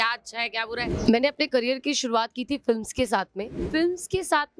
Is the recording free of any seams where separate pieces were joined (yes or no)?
no